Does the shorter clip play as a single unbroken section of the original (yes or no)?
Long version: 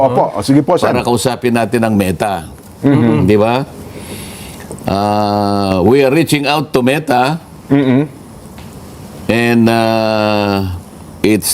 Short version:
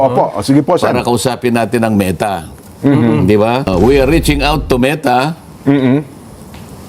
no